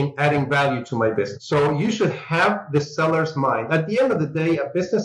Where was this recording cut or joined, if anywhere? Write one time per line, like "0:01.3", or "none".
none